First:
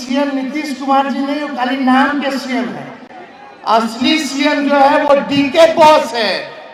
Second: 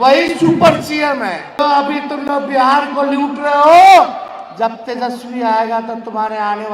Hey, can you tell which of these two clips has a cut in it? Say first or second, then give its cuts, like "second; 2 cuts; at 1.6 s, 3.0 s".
second; 1 cut; at 1.6 s